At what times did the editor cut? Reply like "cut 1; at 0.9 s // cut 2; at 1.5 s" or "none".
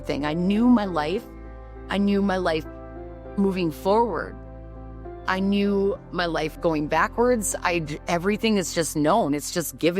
cut 1; at 6.6 s

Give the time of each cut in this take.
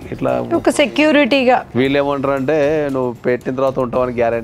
cut 1; at 1.7 s

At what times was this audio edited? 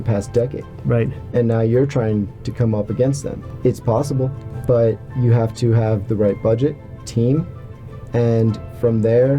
cut 1; at 3.4 s // cut 2; at 4.5 s // cut 3; at 7.0 s

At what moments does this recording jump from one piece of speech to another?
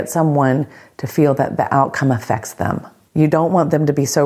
cut 1; at 2.9 s

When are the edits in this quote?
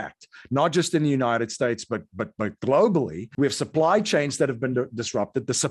cut 1; at 3.2 s

